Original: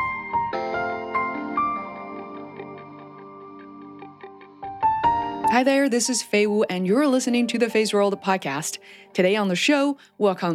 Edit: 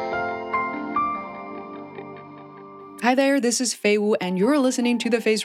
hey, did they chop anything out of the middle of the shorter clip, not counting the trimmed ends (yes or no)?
yes